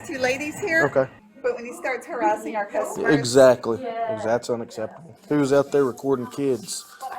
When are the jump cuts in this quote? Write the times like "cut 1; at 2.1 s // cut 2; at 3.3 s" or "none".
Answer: cut 1; at 1.2 s // cut 2; at 5.2 s